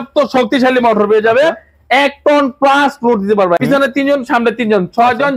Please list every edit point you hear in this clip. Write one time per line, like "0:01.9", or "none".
0:03.6